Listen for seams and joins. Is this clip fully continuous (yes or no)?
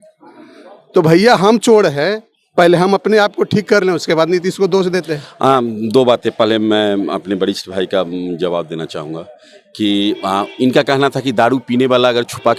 no